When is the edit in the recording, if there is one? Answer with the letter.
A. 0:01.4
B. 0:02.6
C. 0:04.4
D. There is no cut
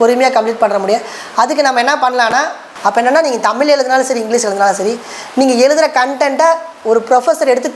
B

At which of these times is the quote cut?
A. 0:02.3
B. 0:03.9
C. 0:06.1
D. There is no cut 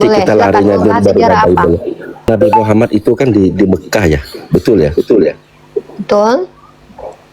A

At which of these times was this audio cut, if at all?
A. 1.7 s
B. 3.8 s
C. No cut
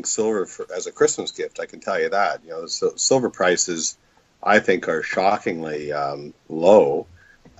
B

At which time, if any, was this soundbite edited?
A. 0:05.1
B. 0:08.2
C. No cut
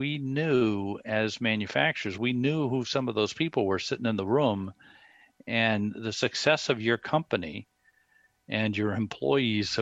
C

